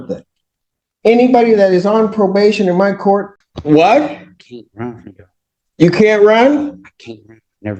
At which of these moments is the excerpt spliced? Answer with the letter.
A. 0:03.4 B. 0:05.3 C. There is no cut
A